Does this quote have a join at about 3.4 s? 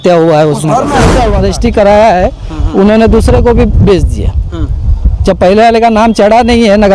no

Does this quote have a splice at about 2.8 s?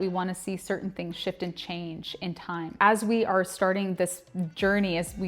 yes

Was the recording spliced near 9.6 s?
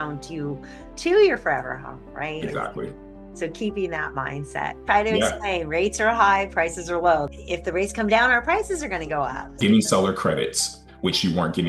yes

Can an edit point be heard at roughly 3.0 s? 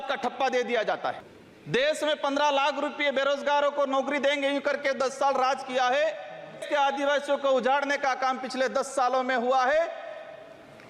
no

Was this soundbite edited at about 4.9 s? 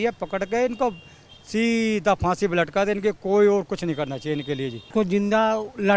yes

